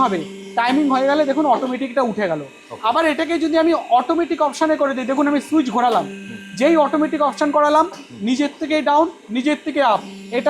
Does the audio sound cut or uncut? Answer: uncut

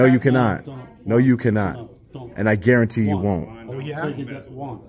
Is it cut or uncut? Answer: uncut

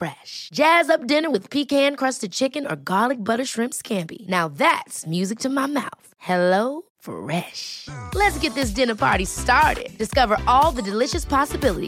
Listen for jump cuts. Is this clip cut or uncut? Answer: uncut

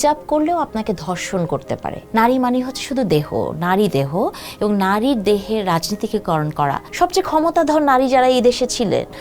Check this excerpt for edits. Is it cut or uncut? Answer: cut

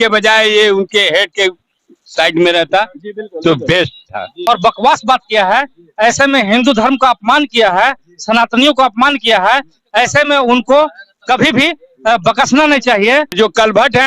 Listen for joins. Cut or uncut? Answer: cut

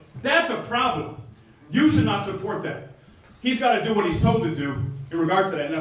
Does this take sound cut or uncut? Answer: uncut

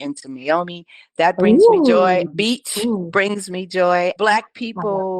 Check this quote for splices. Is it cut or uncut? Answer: cut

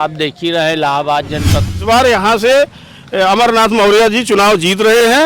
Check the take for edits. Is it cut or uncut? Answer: cut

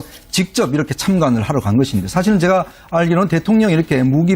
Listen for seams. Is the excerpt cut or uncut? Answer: cut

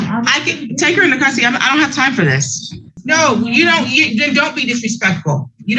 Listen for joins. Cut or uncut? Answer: cut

